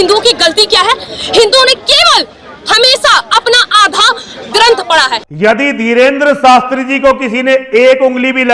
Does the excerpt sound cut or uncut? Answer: cut